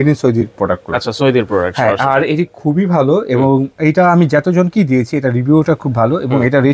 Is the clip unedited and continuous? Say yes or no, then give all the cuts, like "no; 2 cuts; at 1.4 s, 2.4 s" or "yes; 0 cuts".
yes; 0 cuts